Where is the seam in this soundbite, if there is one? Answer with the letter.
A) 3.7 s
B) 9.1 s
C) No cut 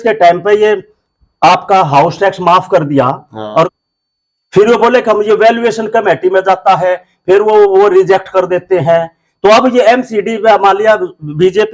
A